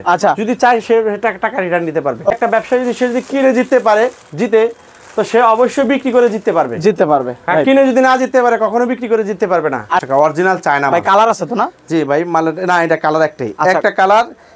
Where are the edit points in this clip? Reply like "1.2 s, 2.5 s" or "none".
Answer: 2.3 s, 10.0 s